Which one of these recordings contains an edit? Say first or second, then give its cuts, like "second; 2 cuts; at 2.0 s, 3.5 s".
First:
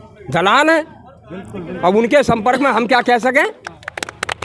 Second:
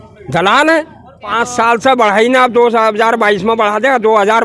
second; 1 cut; at 1.2 s